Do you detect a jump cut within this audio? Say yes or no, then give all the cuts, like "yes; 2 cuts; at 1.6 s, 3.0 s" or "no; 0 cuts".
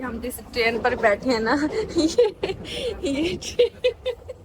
no; 0 cuts